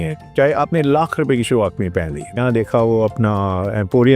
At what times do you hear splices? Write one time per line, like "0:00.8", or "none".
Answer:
0:02.4